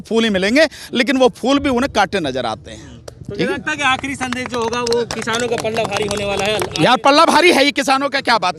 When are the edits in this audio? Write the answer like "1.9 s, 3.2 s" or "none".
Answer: none